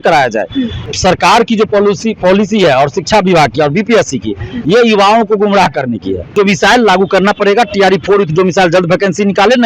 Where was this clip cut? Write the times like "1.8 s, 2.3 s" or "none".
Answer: 0.9 s, 6.3 s